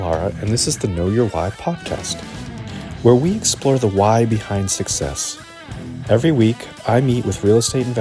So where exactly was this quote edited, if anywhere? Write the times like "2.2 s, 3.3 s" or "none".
none